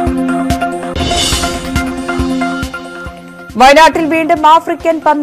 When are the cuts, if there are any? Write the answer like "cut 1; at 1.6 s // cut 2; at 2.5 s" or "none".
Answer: cut 1; at 0.9 s // cut 2; at 3.0 s